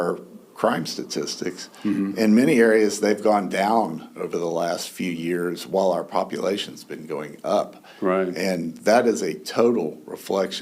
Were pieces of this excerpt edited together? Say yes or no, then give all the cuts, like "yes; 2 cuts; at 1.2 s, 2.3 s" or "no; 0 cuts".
no; 0 cuts